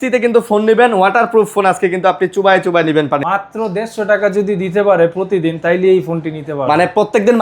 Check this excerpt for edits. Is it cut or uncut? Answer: cut